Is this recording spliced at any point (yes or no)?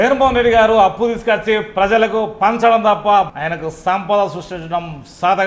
yes